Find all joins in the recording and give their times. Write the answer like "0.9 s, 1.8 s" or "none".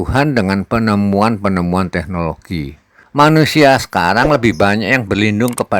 3.0 s